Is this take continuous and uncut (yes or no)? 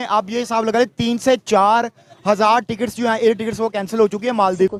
yes